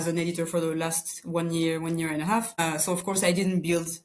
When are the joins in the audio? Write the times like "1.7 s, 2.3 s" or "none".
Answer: 2.6 s

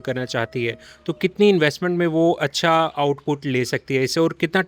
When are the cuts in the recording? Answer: none

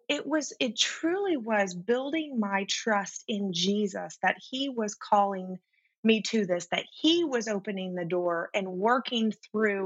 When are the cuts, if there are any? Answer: none

